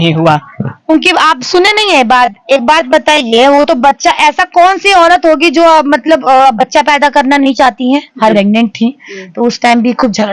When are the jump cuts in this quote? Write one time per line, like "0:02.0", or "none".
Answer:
0:08.3